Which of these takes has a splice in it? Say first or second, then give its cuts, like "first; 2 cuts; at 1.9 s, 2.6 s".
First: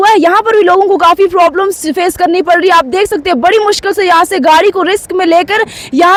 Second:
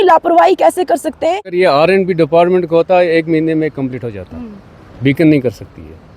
second; 1 cut; at 1.5 s